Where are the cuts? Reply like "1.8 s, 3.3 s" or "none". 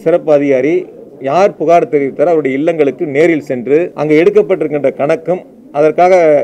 3.9 s